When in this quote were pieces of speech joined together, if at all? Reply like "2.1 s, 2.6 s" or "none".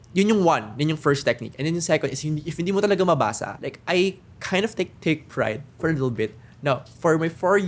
3.4 s